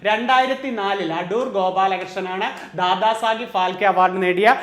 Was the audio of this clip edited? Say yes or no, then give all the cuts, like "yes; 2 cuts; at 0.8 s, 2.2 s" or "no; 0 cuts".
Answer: no; 0 cuts